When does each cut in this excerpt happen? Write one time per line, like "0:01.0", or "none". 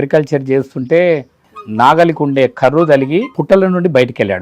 0:01.5
0:03.3

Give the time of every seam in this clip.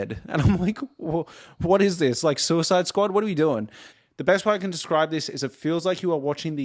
0:03.9

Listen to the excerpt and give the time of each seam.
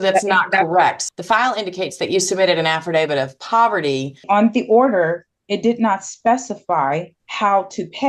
0:01.0
0:04.2
0:07.2

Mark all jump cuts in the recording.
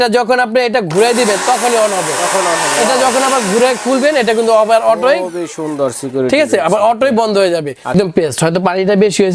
0:07.9

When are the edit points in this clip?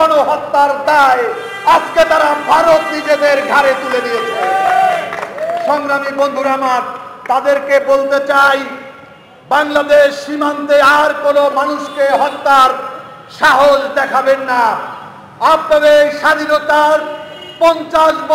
none

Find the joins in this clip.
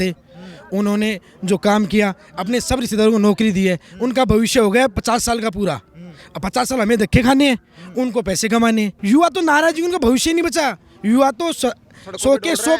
0:09.0

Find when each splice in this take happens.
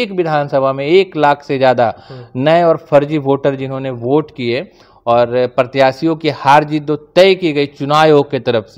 none

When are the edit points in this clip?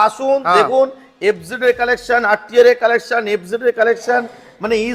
none

